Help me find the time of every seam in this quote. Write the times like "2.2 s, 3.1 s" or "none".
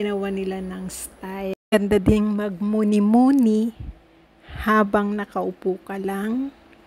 1.7 s